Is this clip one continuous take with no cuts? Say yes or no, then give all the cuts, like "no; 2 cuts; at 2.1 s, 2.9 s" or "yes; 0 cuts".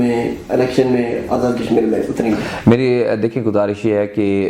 yes; 0 cuts